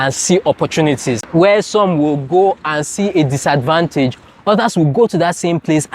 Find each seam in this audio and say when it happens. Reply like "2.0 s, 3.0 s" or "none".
1.2 s